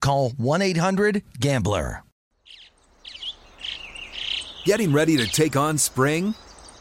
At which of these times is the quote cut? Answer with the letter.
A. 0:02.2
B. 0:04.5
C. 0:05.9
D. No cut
A